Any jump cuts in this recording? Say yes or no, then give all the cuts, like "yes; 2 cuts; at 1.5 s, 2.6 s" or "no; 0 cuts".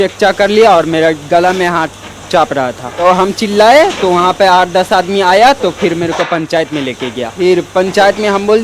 yes; 2 cuts; at 3.0 s, 7.3 s